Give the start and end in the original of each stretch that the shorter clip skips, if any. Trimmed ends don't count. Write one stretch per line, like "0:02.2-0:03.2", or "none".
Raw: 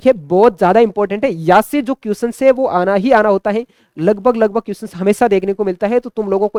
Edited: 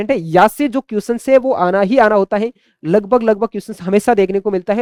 none